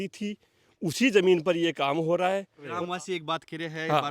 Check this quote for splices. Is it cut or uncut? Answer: cut